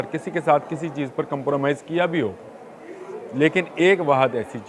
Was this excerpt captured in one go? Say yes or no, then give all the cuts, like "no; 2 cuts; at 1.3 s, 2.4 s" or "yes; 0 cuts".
yes; 0 cuts